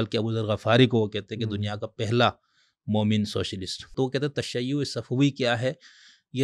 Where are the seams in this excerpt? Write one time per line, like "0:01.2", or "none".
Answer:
0:03.9

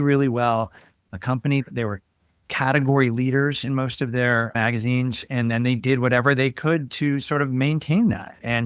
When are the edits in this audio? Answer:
0:01.3

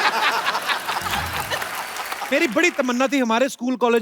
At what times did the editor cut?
0:02.2

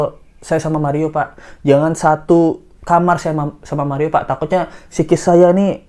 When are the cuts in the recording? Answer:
none

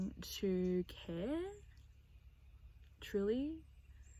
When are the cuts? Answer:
none

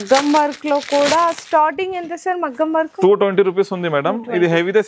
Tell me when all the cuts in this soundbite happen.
none

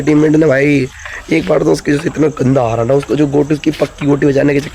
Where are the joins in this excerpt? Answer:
none

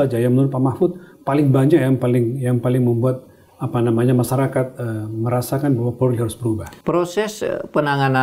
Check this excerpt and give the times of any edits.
0:06.7

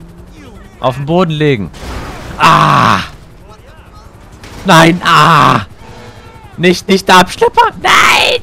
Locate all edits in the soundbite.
none

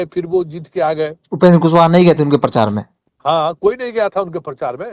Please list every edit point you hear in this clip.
none

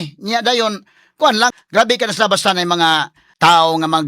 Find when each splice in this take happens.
0:01.5
0:03.2

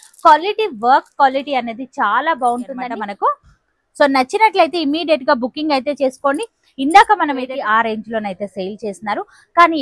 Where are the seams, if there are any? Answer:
0:03.0
0:07.4

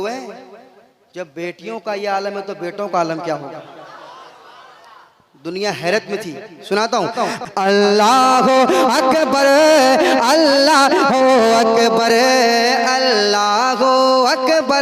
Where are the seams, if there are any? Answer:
0:07.4

